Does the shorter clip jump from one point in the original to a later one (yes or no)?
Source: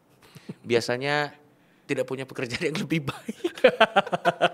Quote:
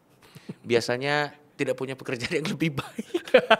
yes